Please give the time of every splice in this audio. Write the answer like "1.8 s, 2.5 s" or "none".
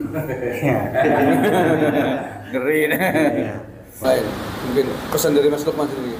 4.0 s